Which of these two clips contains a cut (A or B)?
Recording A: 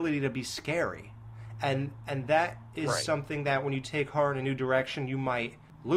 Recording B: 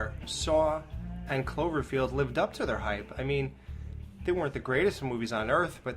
B